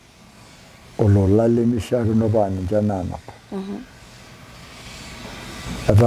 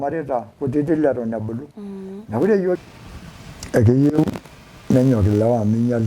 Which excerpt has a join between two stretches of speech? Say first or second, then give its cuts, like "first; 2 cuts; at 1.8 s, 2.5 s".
second; 1 cut; at 2.8 s